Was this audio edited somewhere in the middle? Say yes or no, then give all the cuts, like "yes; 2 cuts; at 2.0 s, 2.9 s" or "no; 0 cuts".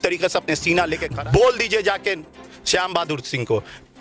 yes; 1 cut; at 1.0 s